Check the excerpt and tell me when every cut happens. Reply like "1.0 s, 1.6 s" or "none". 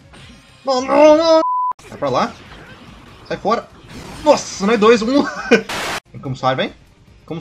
1.4 s, 5.8 s